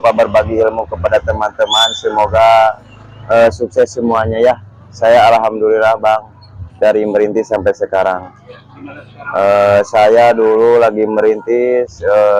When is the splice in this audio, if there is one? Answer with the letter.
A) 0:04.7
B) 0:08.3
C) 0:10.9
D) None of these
D